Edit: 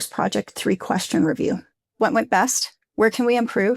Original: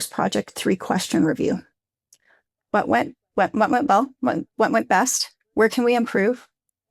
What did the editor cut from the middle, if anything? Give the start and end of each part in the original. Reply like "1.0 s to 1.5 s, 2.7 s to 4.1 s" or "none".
1.9 s to 4.5 s